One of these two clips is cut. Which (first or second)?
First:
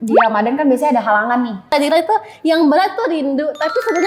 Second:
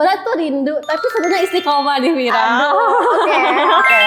first